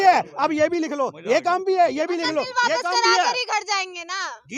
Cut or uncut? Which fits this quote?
uncut